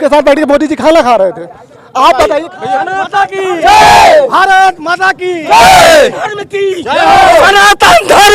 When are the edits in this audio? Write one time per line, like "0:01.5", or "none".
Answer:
0:02.5